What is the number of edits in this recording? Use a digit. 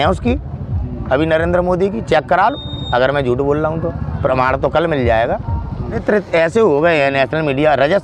1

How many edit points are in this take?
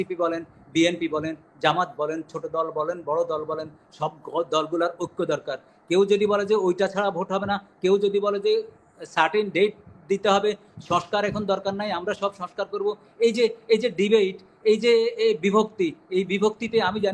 0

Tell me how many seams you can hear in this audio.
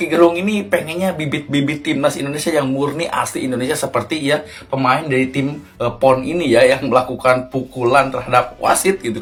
0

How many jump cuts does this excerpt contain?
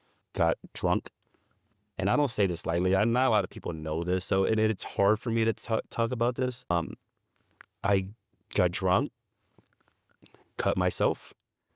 1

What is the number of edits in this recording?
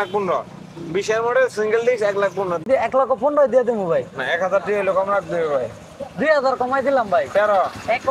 1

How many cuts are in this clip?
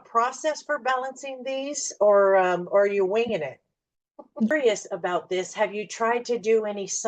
1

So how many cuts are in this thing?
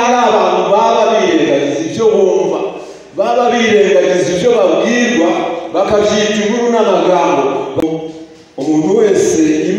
1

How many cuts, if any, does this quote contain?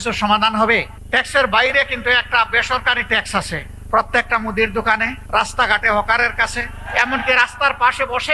4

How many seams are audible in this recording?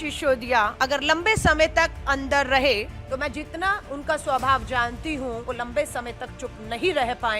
3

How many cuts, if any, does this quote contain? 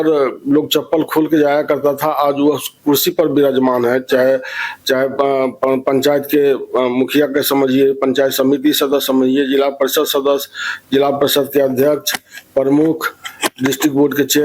0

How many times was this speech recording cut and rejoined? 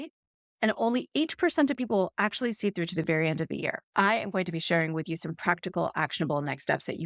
1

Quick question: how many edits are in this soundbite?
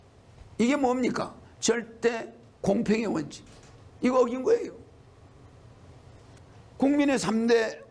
0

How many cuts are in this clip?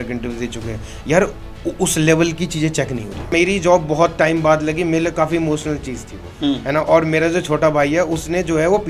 1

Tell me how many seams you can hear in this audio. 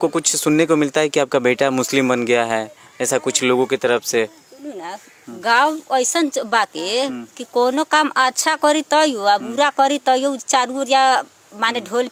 0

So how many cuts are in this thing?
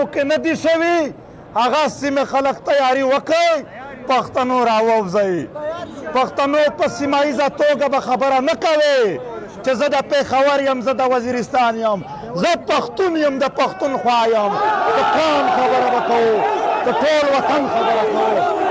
0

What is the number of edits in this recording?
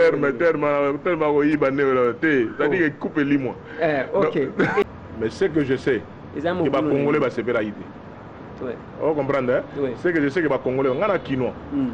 1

